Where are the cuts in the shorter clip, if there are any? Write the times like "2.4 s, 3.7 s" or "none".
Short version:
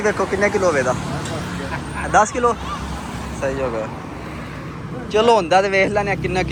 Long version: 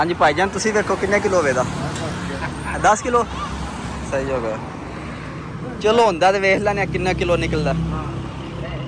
none